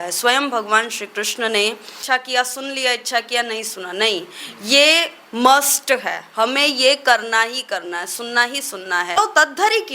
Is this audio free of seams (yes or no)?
no